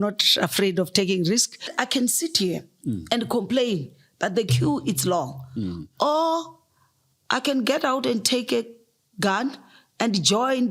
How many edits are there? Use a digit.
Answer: 1